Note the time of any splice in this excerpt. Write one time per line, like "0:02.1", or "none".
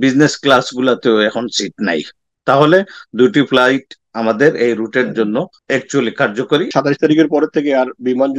0:06.7